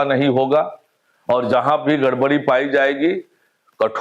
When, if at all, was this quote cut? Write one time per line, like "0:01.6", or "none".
none